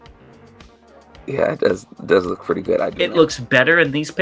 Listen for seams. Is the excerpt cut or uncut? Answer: cut